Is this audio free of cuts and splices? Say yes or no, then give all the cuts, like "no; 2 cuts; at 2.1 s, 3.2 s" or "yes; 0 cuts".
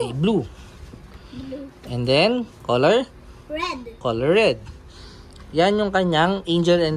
yes; 0 cuts